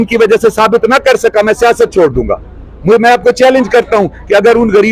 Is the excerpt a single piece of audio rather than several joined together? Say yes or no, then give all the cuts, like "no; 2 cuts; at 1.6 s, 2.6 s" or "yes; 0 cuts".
yes; 0 cuts